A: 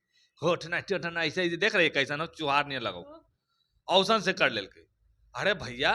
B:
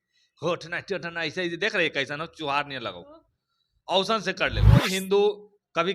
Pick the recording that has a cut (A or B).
B